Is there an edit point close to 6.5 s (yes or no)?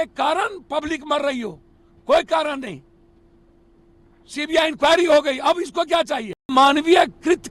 yes